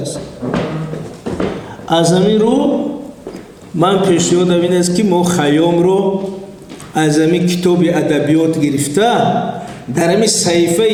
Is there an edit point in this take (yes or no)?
no